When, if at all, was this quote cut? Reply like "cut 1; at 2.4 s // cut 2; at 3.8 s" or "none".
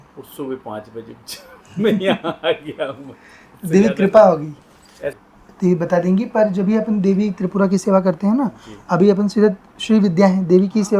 cut 1; at 5.1 s